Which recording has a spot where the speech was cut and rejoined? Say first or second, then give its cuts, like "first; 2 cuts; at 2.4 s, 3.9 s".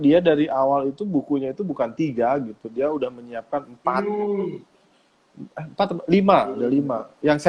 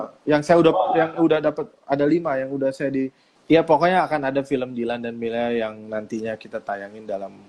second; 1 cut; at 3.3 s